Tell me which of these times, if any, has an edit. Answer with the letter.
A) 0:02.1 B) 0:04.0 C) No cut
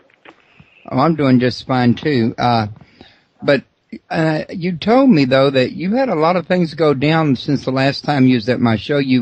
C